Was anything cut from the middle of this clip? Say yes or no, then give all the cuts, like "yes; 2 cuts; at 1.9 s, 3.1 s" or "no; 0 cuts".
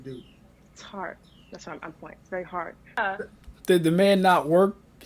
yes; 1 cut; at 3.0 s